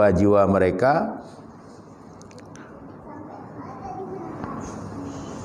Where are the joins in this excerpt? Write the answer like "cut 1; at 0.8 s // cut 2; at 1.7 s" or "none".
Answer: none